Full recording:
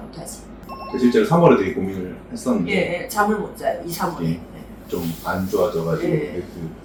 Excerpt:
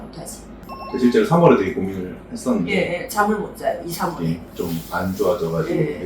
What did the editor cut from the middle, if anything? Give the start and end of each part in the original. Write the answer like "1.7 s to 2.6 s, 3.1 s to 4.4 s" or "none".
4.5 s to 4.8 s